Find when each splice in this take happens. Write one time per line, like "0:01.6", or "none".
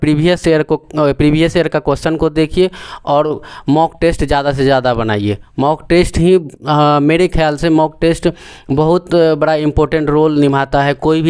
none